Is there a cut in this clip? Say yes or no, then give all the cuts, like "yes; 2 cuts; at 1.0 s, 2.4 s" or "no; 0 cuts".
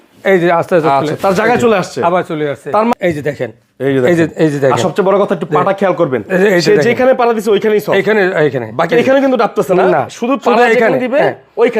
yes; 1 cut; at 2.9 s